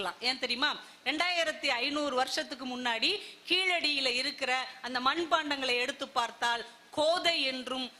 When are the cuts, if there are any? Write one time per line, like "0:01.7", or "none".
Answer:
none